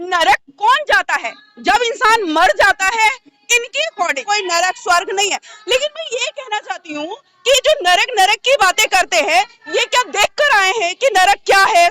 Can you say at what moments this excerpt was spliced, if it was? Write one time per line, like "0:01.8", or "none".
0:04.2